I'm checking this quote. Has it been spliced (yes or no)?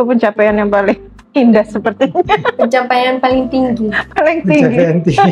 no